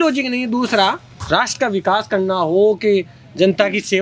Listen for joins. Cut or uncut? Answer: cut